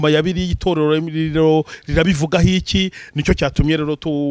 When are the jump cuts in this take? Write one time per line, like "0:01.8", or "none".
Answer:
none